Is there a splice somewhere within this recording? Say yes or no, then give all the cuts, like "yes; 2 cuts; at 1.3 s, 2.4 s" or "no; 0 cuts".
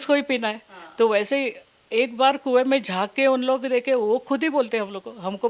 no; 0 cuts